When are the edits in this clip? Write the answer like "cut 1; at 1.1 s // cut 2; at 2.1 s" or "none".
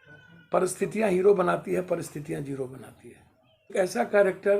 cut 1; at 3.7 s